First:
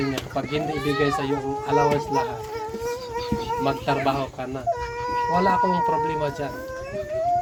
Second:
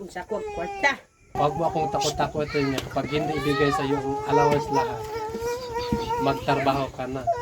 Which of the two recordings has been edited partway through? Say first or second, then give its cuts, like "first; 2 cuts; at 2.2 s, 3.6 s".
second; 1 cut; at 1.4 s